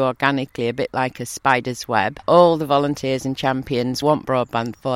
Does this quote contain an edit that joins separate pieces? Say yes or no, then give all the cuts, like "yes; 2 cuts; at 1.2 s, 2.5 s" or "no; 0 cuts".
yes; 2 cuts; at 2.2 s, 4.0 s